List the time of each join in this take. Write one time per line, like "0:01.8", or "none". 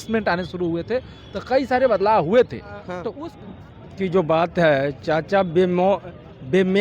0:03.0

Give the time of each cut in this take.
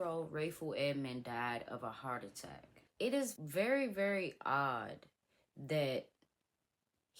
0:03.2

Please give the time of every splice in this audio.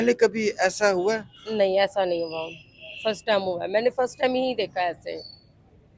none

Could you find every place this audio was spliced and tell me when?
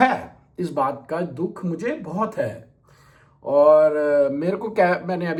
none

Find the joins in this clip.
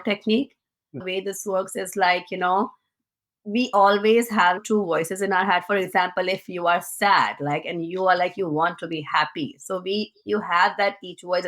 0:01.0

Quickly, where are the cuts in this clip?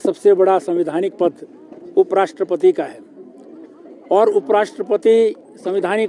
none

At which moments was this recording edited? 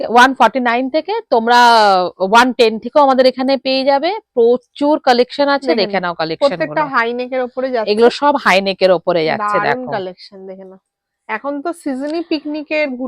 none

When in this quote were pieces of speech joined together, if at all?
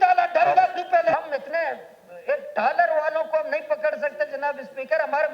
0:01.1

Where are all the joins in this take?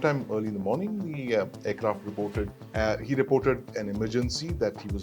0:02.6

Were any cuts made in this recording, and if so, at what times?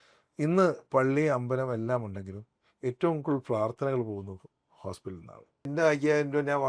0:05.7

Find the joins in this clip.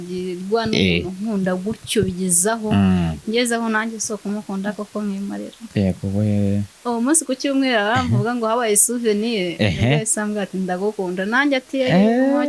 0:06.7

